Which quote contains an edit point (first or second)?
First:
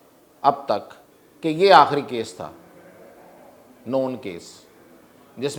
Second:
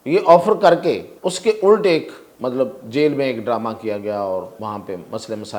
second